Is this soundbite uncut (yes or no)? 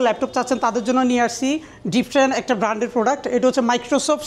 yes